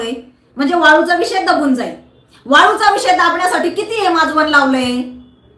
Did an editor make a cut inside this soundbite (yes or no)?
no